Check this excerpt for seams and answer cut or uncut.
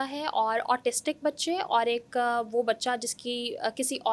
uncut